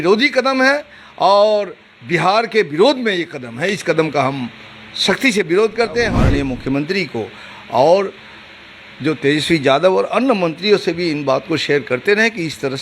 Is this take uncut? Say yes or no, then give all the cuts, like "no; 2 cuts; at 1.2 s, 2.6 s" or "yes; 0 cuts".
no; 1 cut; at 6.2 s